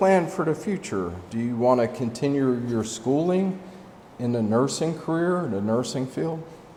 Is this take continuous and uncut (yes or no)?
yes